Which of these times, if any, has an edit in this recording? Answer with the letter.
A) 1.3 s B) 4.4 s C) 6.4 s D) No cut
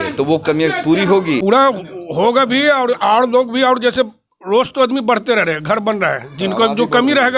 A